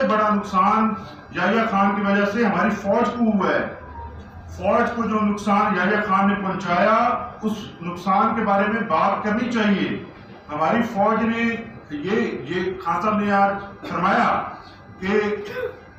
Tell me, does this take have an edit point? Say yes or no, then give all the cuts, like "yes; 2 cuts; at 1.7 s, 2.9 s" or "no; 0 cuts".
no; 0 cuts